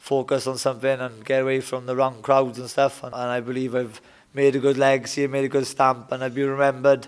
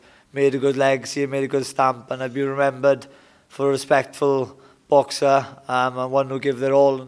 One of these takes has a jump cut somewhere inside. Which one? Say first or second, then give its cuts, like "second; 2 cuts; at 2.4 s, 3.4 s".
first; 1 cut; at 3.1 s